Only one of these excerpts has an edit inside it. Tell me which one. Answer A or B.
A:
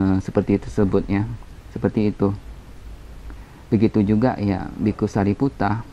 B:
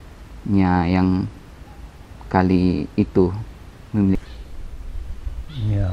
B